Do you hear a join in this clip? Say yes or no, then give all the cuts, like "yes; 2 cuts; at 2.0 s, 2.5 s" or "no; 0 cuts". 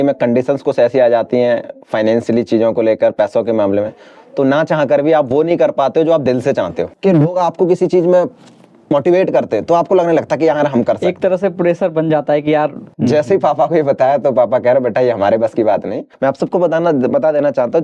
yes; 3 cuts; at 6.9 s, 12.8 s, 16.0 s